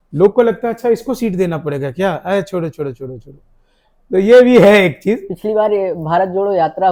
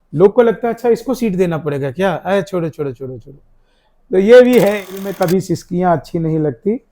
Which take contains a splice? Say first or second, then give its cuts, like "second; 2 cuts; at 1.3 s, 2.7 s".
second; 1 cut; at 5.0 s